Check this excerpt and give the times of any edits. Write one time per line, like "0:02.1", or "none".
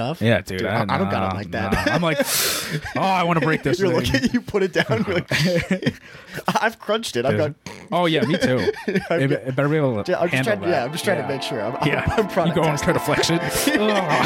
none